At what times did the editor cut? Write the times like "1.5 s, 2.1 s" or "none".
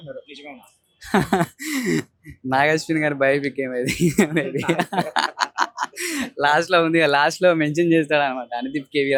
none